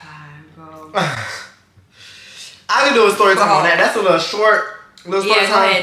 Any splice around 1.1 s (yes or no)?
no